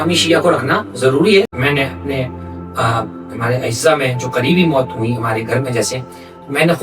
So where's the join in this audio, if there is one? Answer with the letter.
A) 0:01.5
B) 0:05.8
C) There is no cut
A